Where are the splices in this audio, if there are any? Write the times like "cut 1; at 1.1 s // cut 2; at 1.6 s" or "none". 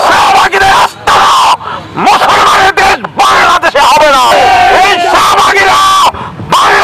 cut 1; at 4.3 s